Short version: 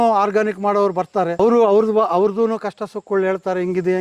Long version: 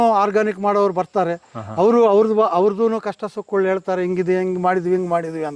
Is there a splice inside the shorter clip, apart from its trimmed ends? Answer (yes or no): yes